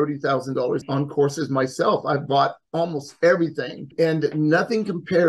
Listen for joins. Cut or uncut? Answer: cut